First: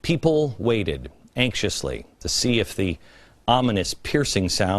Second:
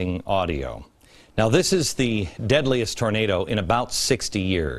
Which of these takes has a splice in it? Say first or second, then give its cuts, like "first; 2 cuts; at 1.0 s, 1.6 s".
second; 1 cut; at 3.3 s